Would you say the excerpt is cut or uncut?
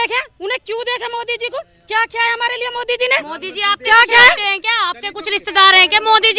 uncut